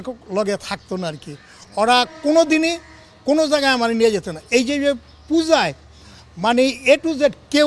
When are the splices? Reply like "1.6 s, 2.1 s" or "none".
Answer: none